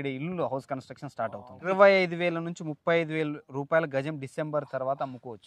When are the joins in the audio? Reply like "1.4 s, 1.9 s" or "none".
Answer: 1.6 s